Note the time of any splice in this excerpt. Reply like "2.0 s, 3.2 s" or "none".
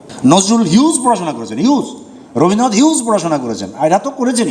none